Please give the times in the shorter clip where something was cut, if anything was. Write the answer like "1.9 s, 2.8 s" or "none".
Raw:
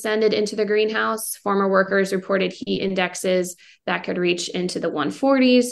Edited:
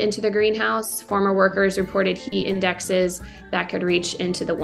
none